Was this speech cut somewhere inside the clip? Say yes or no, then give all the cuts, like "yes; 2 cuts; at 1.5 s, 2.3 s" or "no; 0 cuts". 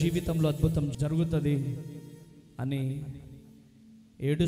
yes; 1 cut; at 0.9 s